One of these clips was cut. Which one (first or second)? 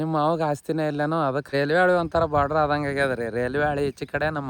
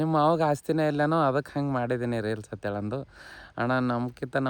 first